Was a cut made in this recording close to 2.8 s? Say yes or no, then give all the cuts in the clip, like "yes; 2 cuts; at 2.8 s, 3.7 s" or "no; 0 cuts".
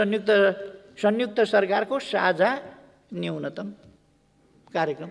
no; 0 cuts